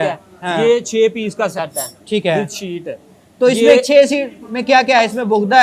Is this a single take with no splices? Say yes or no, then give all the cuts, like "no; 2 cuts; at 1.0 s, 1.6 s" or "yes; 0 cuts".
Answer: yes; 0 cuts